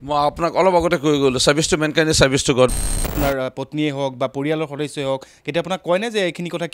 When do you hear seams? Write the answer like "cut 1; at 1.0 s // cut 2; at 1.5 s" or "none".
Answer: cut 1; at 2.7 s